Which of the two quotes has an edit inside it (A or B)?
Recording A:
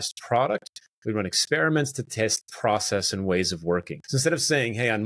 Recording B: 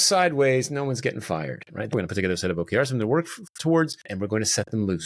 A